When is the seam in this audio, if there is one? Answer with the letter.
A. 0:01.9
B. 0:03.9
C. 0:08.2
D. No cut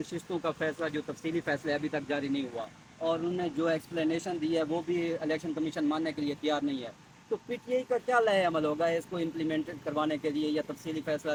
D